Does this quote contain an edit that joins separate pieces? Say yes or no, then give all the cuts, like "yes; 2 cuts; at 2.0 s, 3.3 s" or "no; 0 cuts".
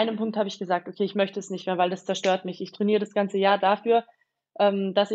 no; 0 cuts